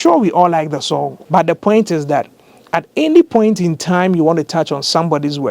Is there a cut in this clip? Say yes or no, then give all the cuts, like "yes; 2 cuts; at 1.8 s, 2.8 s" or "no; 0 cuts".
yes; 1 cut; at 1.1 s